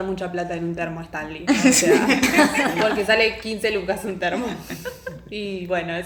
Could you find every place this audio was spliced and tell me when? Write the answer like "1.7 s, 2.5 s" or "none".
none